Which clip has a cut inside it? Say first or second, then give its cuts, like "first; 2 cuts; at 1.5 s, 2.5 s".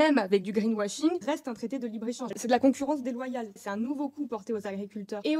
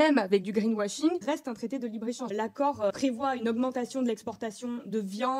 first; 1 cut; at 2.3 s